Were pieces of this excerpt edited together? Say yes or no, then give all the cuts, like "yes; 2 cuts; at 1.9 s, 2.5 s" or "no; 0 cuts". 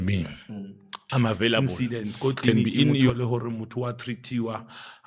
yes; 1 cut; at 3.1 s